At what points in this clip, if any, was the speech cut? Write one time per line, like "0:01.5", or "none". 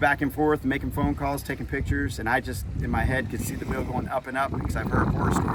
none